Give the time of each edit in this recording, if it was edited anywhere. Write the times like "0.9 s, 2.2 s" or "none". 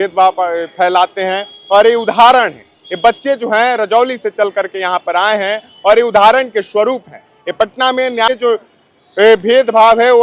8.3 s